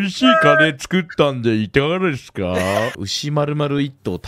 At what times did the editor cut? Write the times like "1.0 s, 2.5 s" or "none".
2.9 s